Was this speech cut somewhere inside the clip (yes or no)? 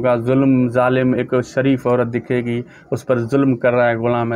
no